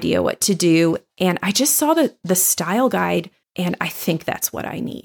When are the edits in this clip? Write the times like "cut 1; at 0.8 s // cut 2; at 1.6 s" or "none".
cut 1; at 3.4 s